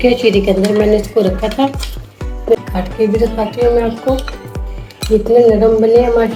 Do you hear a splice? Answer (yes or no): no